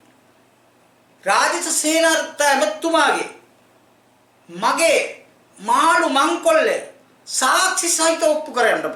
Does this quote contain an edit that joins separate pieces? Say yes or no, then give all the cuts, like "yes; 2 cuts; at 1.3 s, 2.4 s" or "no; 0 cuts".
no; 0 cuts